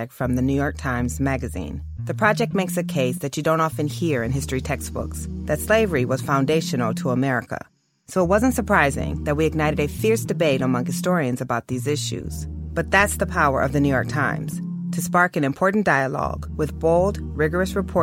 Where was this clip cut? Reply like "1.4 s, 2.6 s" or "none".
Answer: 11.0 s